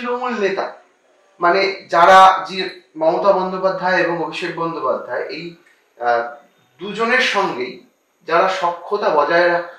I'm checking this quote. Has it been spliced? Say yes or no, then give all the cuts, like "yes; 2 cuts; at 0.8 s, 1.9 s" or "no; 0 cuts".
no; 0 cuts